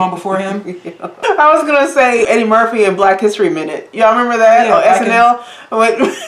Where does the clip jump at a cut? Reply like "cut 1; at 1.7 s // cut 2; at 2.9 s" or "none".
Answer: cut 1; at 1.1 s // cut 2; at 2.3 s